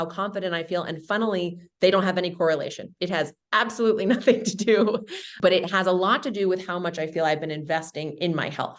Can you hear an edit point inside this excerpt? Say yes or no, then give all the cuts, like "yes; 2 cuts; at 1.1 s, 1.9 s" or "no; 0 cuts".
no; 0 cuts